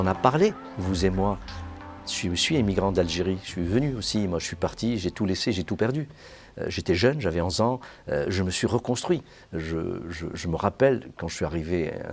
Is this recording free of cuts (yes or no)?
yes